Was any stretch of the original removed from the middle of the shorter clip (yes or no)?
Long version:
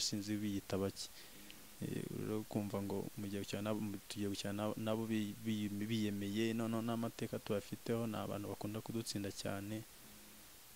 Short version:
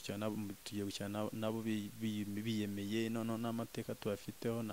no